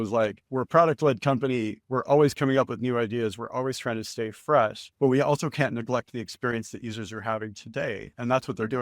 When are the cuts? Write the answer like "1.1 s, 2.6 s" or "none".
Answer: none